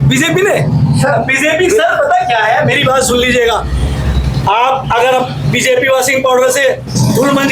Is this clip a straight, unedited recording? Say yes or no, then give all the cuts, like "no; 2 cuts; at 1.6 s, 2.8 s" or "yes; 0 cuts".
yes; 0 cuts